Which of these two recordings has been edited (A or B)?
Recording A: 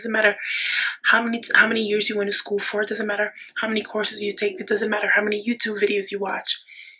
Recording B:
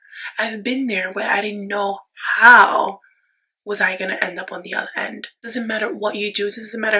B